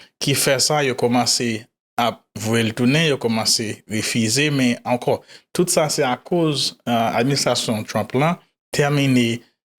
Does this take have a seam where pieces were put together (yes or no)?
no